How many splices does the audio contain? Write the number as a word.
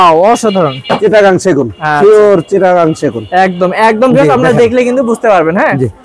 one